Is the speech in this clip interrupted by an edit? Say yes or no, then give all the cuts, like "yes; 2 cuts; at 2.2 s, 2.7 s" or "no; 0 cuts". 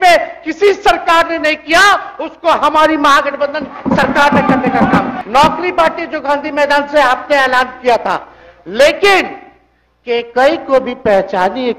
yes; 1 cut; at 5.1 s